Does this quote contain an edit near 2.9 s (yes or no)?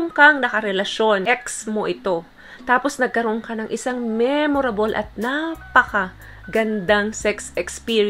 no